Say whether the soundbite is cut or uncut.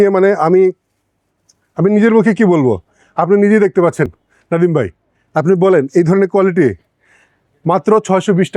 uncut